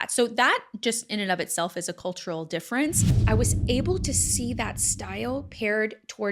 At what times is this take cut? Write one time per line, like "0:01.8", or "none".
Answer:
0:03.2